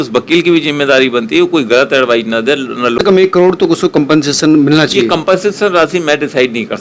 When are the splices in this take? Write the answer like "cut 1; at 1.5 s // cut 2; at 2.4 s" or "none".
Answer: cut 1; at 3.0 s